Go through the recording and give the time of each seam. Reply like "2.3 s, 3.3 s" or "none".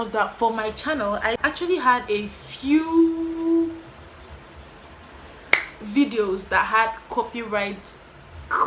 1.4 s

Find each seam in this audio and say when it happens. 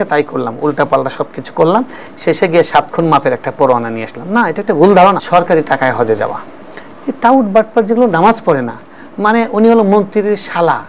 5.2 s

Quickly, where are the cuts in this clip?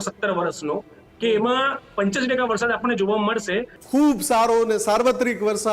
3.7 s

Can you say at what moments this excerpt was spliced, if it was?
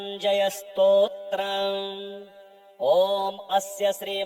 none

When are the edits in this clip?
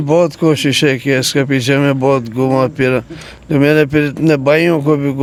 none

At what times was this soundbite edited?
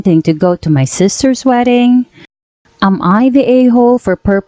2.6 s

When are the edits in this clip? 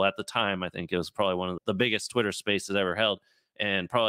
1.5 s

